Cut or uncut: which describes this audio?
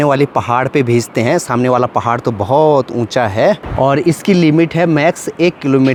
uncut